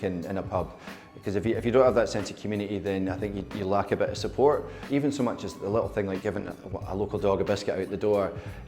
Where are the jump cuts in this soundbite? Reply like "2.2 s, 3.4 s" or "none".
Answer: none